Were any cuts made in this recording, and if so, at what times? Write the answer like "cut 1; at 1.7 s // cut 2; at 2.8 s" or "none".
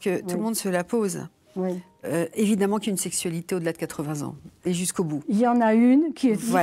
none